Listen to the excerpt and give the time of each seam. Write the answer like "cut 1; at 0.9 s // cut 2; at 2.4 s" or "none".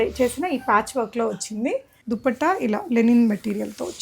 cut 1; at 1.9 s